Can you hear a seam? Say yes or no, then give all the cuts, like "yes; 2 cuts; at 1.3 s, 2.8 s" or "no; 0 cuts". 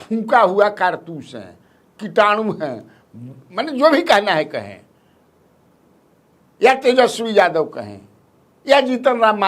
no; 0 cuts